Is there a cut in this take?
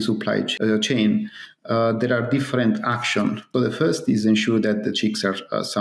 yes; 1 cut; at 3.5 s

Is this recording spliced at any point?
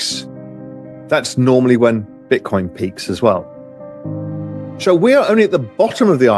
yes; 2 cuts; at 3.5 s, 4.8 s

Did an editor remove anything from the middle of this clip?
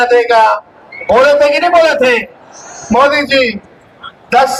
no; 0 cuts

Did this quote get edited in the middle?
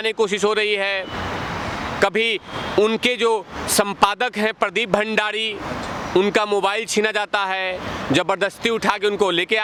no; 0 cuts

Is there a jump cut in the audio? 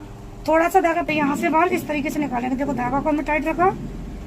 yes; 1 cut; at 1.1 s

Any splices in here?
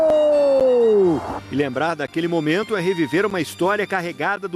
no; 0 cuts

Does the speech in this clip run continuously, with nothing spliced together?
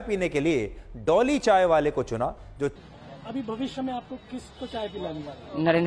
no; 1 cut; at 2.7 s

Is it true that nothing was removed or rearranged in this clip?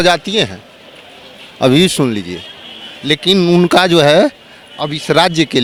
yes; 0 cuts

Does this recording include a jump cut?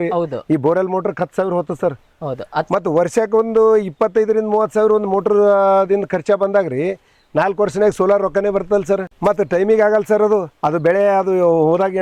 no; 0 cuts

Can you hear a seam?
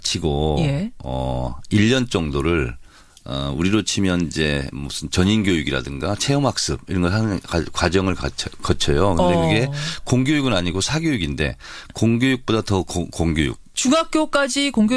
yes; 1 cut; at 11.4 s

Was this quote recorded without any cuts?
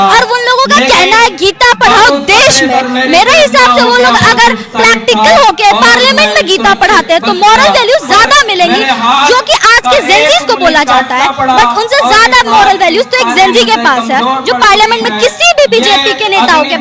yes; 0 cuts

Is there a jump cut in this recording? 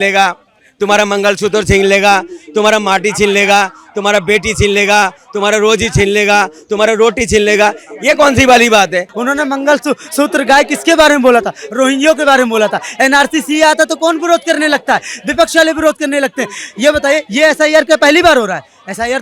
yes; 1 cut; at 9.1 s

